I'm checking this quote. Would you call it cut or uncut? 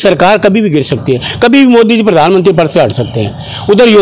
uncut